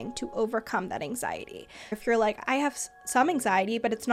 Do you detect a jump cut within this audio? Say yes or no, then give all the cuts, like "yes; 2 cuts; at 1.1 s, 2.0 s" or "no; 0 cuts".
yes; 1 cut; at 2.0 s